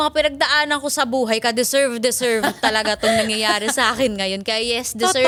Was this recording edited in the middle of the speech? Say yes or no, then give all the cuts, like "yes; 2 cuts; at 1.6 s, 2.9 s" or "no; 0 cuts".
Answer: no; 0 cuts